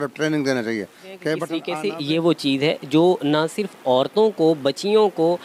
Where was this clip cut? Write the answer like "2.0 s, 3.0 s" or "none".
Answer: 1.6 s